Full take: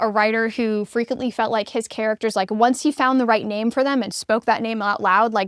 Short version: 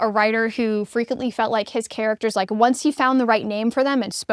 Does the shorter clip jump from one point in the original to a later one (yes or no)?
no